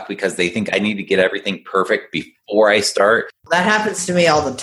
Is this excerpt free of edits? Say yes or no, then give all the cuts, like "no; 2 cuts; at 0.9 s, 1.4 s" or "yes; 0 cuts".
no; 1 cut; at 3.3 s